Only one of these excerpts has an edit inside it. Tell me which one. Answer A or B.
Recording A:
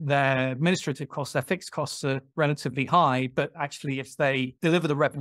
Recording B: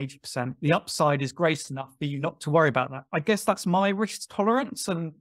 A